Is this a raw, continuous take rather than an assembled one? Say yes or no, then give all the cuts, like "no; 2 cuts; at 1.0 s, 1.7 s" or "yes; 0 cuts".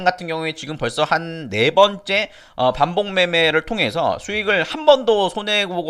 yes; 0 cuts